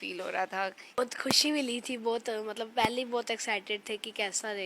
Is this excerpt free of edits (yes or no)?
no